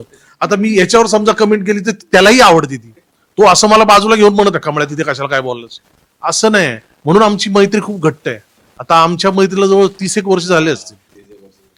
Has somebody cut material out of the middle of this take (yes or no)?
no